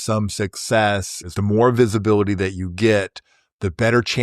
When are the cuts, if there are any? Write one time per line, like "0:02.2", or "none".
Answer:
0:01.3